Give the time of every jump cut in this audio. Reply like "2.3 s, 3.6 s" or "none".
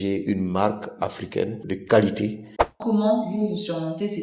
2.8 s